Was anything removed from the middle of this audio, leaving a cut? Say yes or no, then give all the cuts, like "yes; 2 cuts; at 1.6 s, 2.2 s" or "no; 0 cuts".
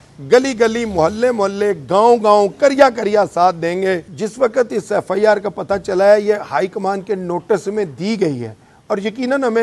yes; 1 cut; at 4.1 s